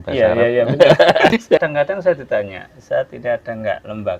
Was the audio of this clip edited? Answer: yes; 1 cut; at 1.7 s

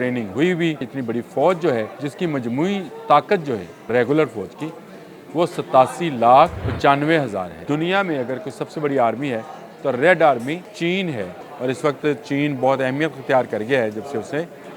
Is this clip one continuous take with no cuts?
no; 7 cuts; at 0.9 s, 2.0 s, 3.9 s, 6.6 s, 7.6 s, 10.7 s, 11.4 s

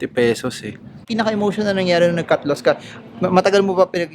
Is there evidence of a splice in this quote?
yes; 1 cut; at 1.1 s

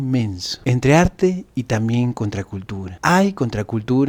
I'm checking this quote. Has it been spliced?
no; 0 cuts

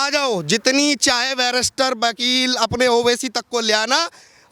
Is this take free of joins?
yes; 0 cuts

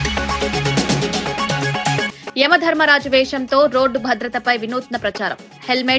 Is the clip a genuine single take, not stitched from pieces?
no; 1 cut; at 2.1 s

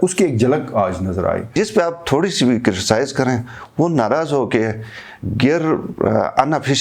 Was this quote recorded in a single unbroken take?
no; 1 cut; at 1.5 s

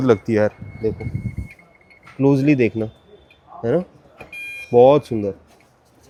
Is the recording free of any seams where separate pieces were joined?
yes; 0 cuts

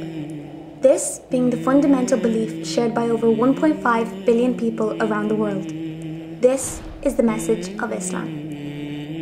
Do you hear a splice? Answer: yes; 1 cut; at 7.6 s

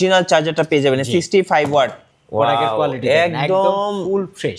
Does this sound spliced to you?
yes; 1 cut; at 2.0 s

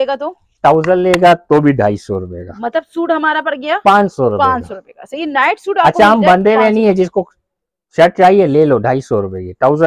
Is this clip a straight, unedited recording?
yes; 0 cuts

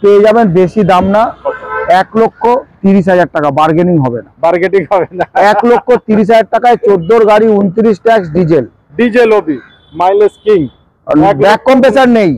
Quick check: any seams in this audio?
no; 0 cuts

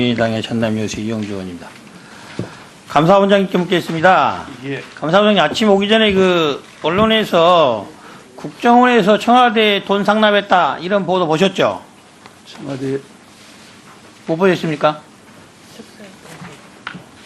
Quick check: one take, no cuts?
yes; 0 cuts

